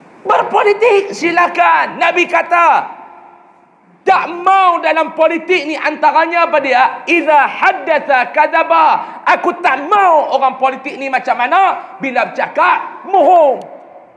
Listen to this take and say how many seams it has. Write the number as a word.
zero